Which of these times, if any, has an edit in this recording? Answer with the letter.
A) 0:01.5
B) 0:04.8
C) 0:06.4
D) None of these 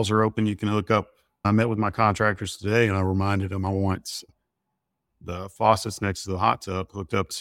A